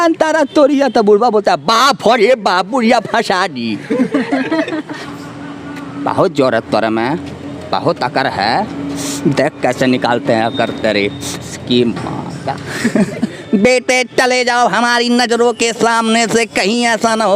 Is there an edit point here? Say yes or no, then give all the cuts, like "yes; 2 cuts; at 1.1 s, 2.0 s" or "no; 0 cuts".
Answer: yes; 2 cuts; at 5.1 s, 13.3 s